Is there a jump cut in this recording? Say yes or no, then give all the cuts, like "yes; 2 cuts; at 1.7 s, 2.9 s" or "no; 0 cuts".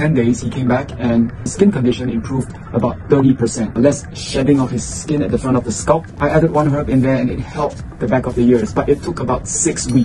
yes; 3 cuts; at 1.5 s, 3.7 s, 6.1 s